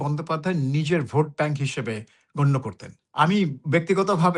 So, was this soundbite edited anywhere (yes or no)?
yes